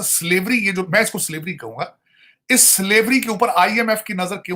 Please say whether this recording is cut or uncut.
uncut